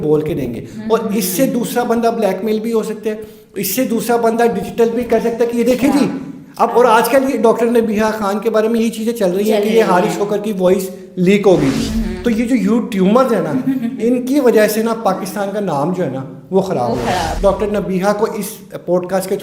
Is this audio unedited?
no; 2 cuts; at 11.9 s, 17.3 s

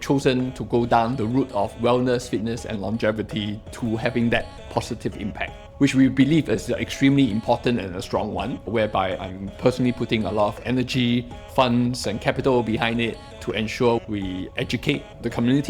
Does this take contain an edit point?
no; 0 cuts

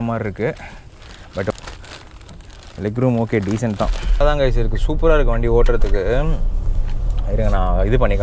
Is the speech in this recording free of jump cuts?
no; 2 cuts; at 1.5 s, 4.2 s

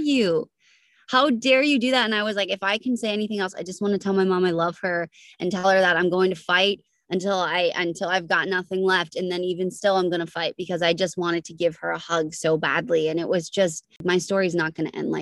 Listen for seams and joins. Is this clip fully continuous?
no; 1 cut; at 14.0 s

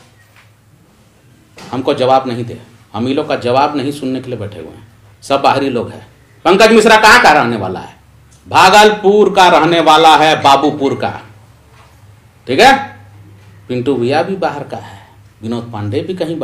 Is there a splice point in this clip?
no; 0 cuts

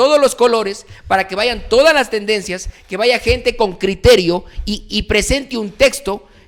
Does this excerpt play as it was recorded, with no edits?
yes; 0 cuts

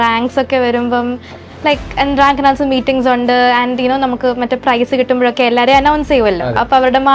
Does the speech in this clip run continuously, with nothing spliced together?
yes; 0 cuts

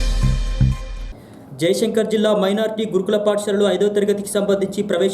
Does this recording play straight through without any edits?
no; 1 cut; at 1.0 s

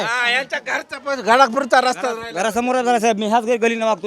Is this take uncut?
yes; 0 cuts

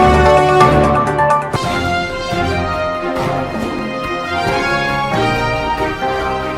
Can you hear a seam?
no; 0 cuts

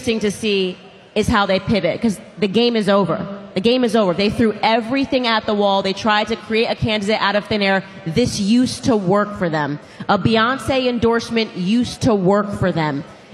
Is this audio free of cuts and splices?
yes; 0 cuts

